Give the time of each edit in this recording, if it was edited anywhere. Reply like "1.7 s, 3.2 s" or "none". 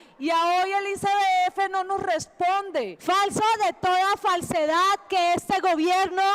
2.9 s